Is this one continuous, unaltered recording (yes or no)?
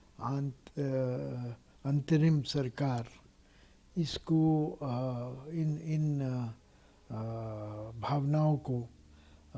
yes